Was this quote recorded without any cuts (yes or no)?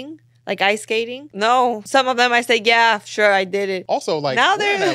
no